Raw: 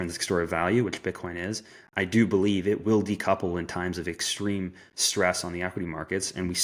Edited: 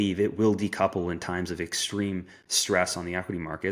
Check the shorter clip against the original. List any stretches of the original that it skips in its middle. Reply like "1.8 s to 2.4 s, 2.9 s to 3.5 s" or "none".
none